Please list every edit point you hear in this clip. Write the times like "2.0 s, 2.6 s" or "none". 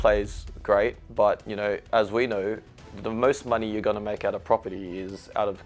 none